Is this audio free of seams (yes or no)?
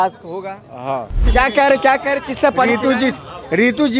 no